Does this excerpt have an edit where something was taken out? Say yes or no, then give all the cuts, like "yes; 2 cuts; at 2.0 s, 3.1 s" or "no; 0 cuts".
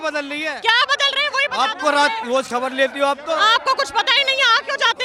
no; 0 cuts